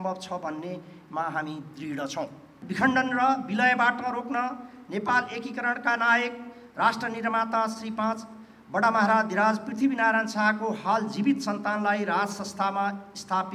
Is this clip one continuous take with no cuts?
no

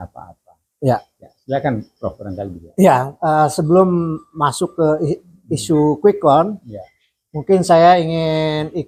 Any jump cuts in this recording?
no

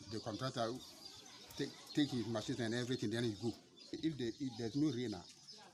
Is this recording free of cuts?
yes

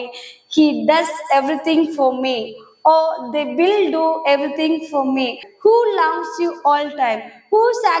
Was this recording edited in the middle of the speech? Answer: yes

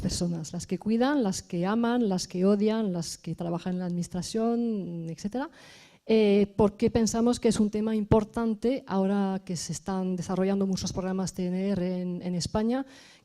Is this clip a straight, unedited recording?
no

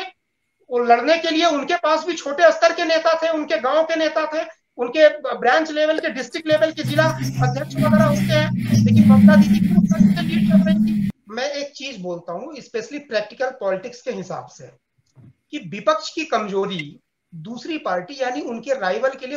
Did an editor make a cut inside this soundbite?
yes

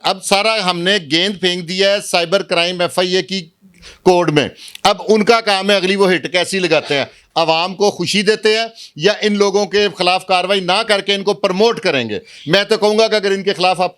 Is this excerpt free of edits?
yes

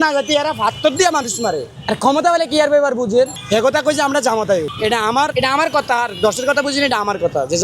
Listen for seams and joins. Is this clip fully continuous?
yes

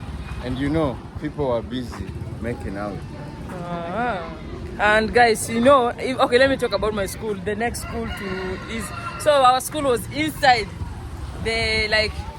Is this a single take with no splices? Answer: yes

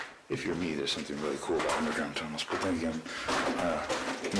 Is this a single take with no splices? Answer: yes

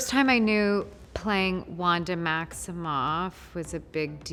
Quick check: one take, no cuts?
yes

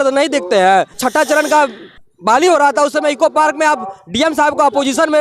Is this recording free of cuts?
no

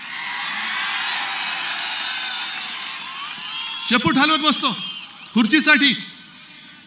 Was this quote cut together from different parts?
no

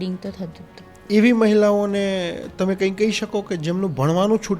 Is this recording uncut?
no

